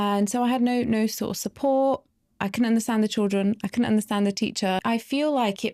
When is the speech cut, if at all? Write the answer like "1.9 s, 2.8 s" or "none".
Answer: 4.8 s